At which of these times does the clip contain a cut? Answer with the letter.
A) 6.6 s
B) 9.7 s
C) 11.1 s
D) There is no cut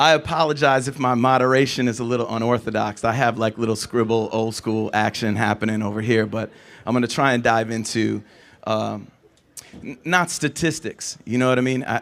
B